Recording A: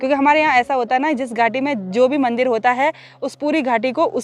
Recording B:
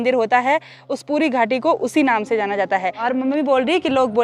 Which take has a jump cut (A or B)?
B